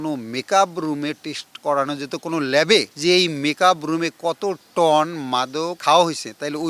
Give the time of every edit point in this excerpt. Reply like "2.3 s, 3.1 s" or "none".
5.7 s

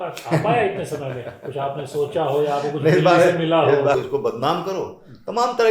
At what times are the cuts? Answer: 4.0 s

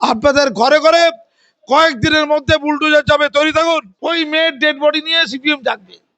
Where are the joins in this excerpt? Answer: 3.9 s

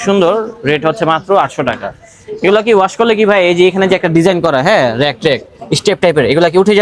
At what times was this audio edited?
none

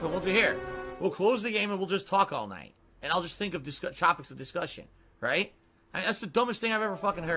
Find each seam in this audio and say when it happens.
3.6 s

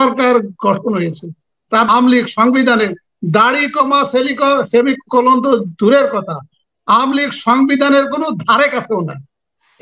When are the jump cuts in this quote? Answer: 1.9 s

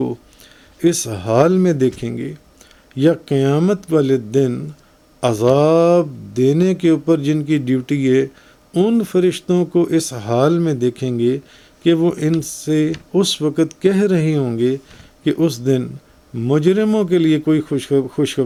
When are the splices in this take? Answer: none

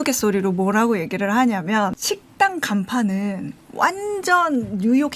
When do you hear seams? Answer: 2.0 s

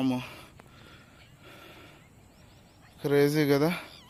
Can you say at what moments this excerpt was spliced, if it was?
none

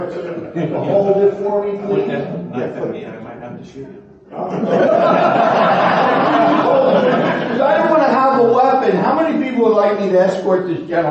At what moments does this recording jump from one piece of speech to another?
none

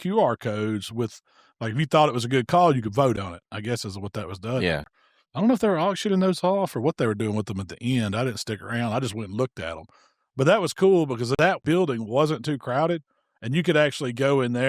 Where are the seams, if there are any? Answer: 4.8 s, 11.5 s

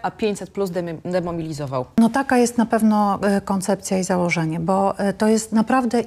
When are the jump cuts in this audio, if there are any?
1.9 s

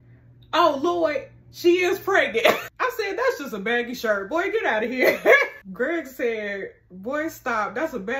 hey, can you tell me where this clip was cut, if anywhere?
2.6 s, 5.6 s

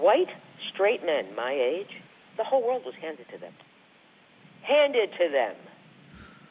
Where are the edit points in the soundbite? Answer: none

